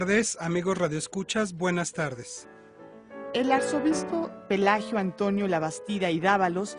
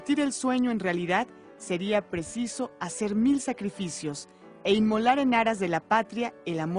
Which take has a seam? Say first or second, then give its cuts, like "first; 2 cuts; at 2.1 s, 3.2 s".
second; 1 cut; at 1.7 s